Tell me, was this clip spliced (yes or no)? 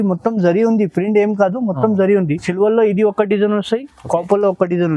yes